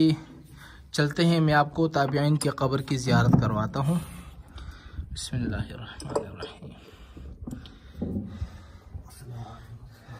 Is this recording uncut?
yes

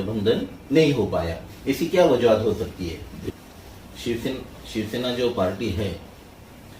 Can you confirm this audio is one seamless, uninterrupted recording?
no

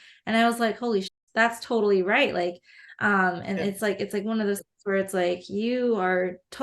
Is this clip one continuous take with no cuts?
no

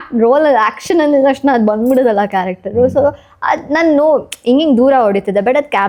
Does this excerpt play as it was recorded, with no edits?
yes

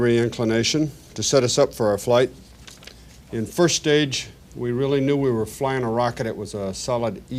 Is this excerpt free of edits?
no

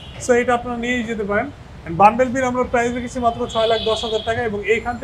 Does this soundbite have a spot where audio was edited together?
no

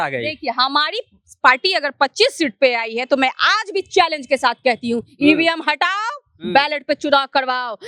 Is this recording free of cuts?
yes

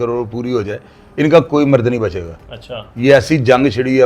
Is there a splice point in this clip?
no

